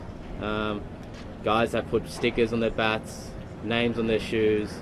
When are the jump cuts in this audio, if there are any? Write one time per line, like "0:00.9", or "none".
none

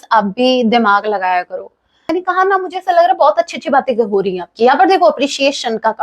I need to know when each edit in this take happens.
0:02.1

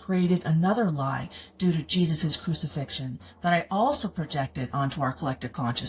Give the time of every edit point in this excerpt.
none

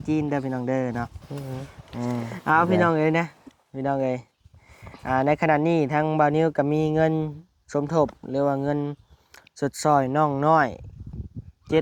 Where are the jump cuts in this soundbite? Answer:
0:02.3

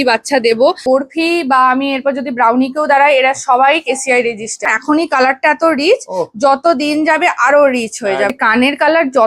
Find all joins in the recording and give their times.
0:00.8
0:04.7
0:08.4

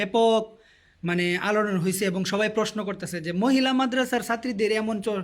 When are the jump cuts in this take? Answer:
0:02.7

